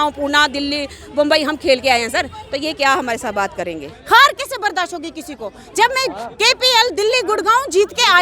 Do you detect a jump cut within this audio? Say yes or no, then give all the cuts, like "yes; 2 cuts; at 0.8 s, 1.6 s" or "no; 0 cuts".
yes; 1 cut; at 3.9 s